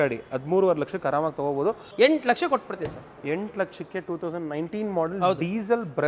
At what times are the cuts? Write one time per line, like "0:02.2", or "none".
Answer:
0:01.9

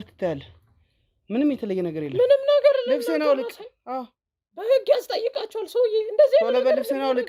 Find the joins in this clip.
none

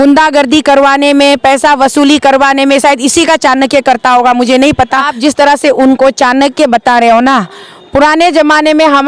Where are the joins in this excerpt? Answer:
0:05.1

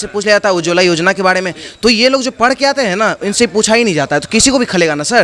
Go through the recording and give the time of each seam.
none

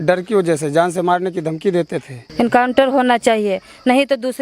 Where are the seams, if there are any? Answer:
0:02.2

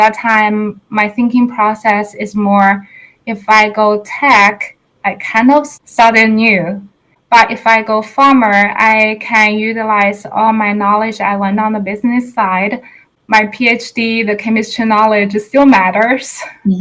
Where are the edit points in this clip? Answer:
0:05.7
0:07.1
0:13.0

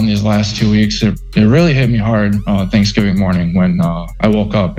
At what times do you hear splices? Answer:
none

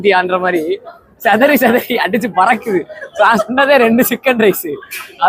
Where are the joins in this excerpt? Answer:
0:01.0

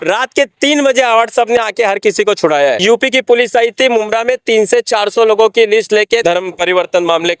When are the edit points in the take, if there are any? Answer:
0:02.8
0:06.2

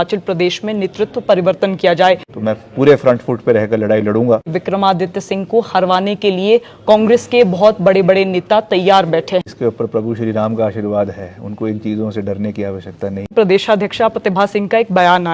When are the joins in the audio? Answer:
0:02.3
0:04.5
0:09.5
0:13.3

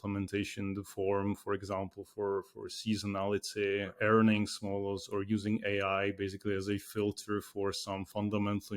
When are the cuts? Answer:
0:03.9

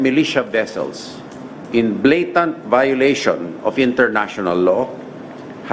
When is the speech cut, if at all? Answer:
none

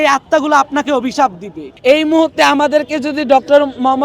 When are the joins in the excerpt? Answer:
0:01.6

